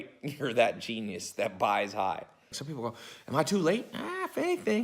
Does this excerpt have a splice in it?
yes; 1 cut; at 2.6 s

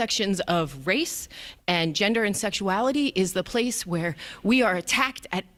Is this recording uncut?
yes; 0 cuts

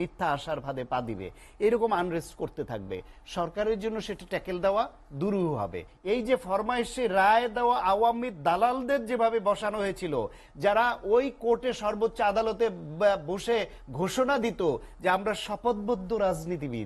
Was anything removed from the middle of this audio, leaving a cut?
yes; 1 cut; at 5.9 s

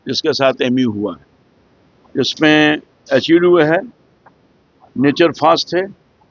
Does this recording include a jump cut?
no; 0 cuts

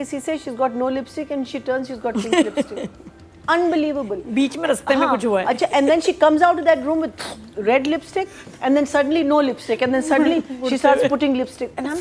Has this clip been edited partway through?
no; 0 cuts

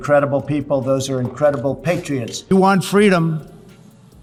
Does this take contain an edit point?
no; 0 cuts

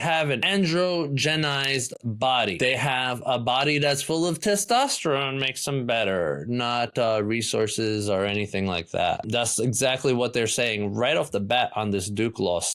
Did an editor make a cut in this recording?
yes; 1 cut; at 9.2 s

